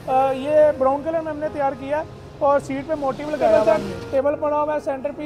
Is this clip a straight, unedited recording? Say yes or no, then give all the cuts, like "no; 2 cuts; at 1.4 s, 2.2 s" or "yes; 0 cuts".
no; 1 cut; at 3.7 s